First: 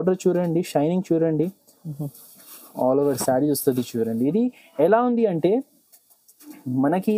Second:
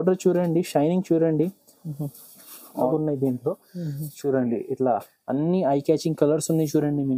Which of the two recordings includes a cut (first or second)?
second